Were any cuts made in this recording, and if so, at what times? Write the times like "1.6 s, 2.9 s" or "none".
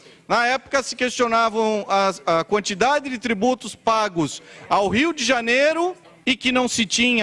6.1 s